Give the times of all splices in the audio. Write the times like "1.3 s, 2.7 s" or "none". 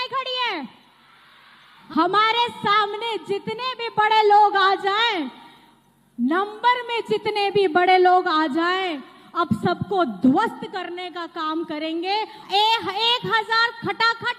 1.7 s, 12.4 s